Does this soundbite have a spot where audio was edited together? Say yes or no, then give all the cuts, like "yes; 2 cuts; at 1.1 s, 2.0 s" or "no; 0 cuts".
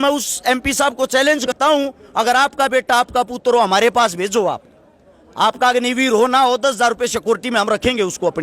yes; 1 cut; at 1.5 s